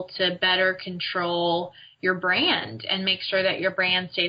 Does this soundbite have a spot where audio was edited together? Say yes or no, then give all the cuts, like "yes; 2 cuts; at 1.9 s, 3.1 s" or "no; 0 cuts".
no; 0 cuts